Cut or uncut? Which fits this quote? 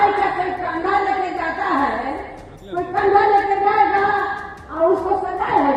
uncut